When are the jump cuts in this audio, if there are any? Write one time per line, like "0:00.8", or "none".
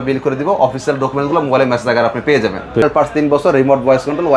0:02.8